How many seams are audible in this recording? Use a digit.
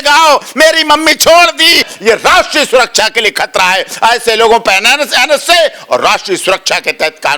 1